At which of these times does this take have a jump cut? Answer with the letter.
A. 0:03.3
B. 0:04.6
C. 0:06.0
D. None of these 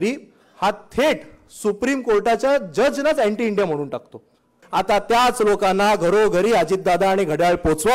B